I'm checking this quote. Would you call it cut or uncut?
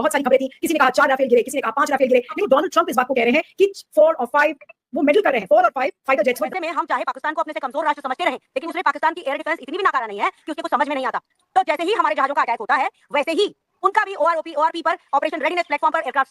cut